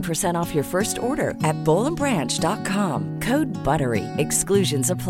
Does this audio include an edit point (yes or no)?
no